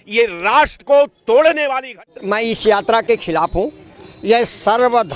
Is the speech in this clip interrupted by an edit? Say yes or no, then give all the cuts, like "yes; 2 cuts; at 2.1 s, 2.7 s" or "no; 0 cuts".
yes; 1 cut; at 2.2 s